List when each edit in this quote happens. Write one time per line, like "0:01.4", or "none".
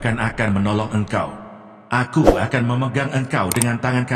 none